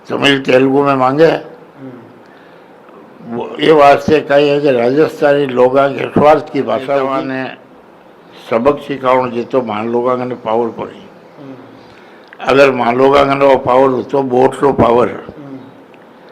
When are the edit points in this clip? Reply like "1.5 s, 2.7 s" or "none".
7.0 s